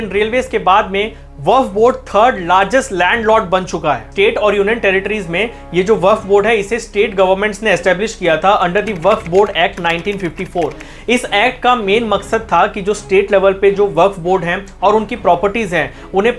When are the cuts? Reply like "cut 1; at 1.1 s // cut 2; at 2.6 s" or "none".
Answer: none